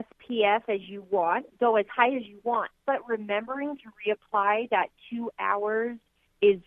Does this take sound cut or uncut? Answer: uncut